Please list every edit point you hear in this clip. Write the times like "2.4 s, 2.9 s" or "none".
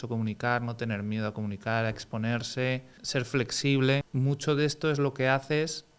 3.0 s, 4.1 s